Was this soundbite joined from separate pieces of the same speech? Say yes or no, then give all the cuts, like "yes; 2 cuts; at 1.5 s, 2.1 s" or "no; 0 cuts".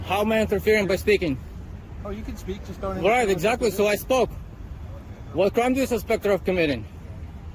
no; 0 cuts